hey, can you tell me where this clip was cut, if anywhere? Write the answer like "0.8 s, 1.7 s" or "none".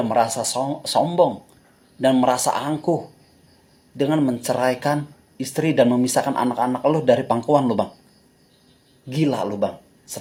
none